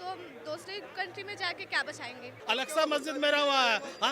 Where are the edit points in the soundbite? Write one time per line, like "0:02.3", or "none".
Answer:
0:02.3